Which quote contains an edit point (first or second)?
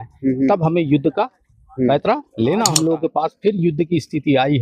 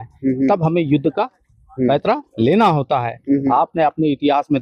first